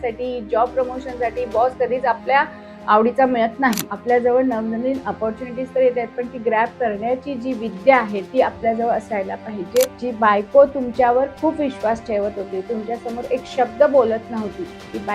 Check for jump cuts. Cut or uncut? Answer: cut